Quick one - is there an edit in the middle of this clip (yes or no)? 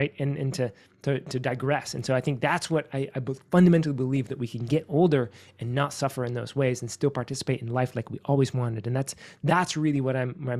no